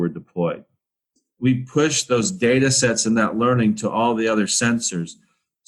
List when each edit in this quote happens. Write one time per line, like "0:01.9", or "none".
0:01.2